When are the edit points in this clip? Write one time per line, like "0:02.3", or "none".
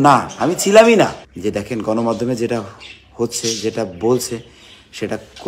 0:01.2